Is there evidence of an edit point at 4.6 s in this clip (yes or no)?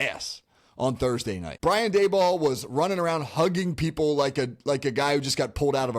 no